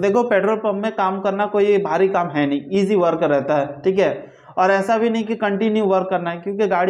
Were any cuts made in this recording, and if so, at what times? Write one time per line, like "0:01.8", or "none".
none